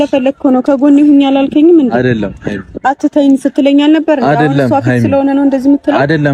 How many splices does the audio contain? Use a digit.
0